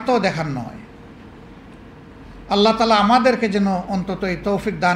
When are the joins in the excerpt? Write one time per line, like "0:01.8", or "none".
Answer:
none